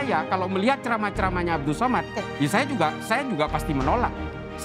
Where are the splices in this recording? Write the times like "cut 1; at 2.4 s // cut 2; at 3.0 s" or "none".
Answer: none

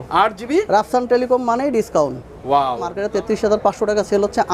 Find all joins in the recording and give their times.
cut 1; at 3.0 s

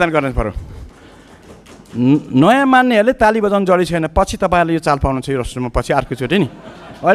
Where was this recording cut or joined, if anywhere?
none

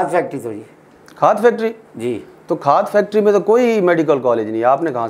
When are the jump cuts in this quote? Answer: none

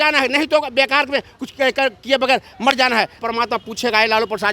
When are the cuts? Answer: cut 1; at 3.2 s

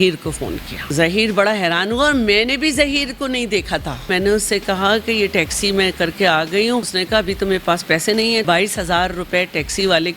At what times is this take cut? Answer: cut 1; at 0.9 s // cut 2; at 4.1 s // cut 3; at 7.0 s // cut 4; at 8.4 s

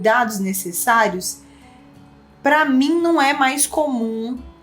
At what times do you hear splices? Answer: none

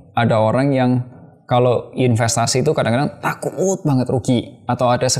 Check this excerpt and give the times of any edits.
none

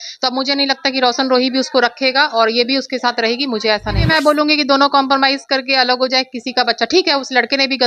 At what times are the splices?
cut 1; at 4.0 s

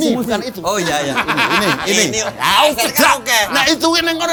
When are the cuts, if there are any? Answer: none

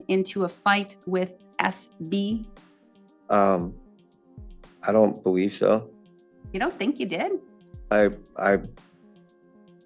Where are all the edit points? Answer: none

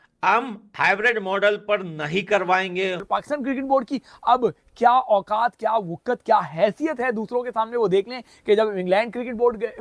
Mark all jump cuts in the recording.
cut 1; at 3.1 s

